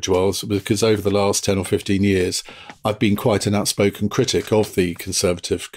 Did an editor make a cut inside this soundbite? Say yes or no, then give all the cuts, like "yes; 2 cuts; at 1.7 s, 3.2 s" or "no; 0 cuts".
no; 0 cuts